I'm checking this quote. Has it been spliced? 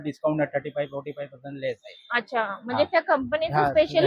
no; 0 cuts

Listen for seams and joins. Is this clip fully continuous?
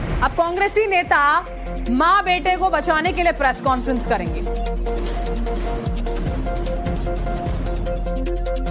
yes; 0 cuts

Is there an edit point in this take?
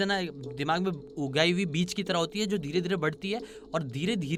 no; 0 cuts

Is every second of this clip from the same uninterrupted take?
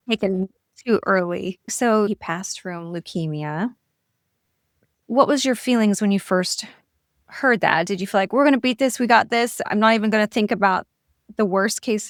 yes; 0 cuts

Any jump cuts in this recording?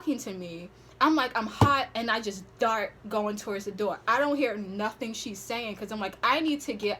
yes; 1 cut; at 4.0 s

